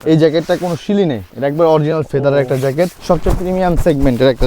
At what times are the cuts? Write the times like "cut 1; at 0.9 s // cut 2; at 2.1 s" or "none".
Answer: cut 1; at 3.0 s